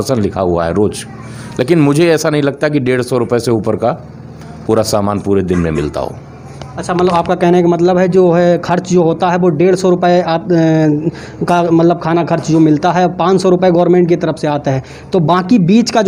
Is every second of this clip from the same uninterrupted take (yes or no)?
yes